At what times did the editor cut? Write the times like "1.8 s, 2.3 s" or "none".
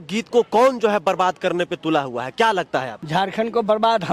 none